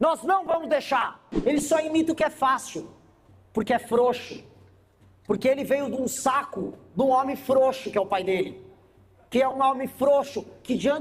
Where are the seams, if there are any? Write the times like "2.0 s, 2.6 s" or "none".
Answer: 1.2 s